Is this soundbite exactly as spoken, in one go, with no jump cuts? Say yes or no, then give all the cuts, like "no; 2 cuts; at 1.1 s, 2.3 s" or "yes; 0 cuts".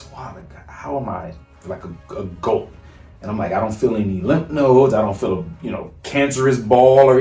yes; 0 cuts